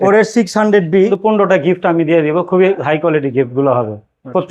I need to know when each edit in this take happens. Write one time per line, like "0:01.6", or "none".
0:01.1